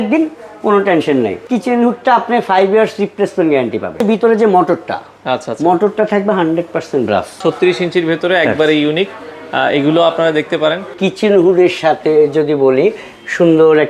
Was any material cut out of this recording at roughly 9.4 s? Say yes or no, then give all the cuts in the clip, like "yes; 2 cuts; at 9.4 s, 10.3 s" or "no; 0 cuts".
no; 4 cuts; at 1.4 s, 4.0 s, 7.4 s, 10.9 s